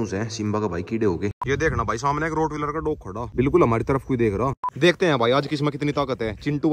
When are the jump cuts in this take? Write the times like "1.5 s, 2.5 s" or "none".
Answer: 1.4 s, 3.3 s, 4.8 s